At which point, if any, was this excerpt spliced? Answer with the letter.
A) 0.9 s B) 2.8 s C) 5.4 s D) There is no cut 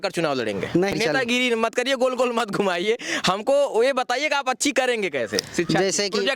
A